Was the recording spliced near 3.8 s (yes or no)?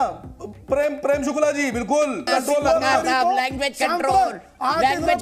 no